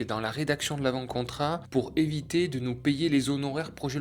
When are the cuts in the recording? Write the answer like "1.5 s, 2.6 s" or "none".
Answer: 1.6 s

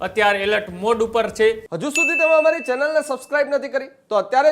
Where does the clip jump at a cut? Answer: 1.7 s

